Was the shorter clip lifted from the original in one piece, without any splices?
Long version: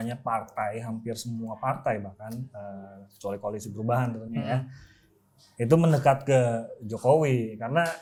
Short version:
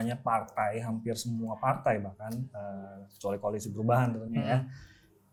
yes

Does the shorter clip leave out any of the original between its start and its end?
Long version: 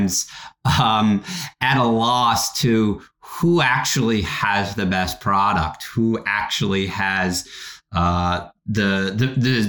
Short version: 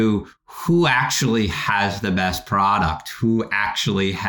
no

